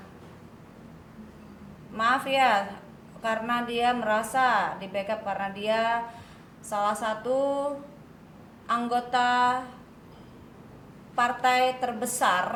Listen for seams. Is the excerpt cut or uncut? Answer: uncut